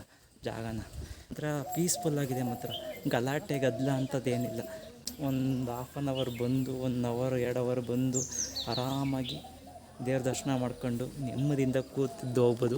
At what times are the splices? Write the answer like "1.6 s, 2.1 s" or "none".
1.4 s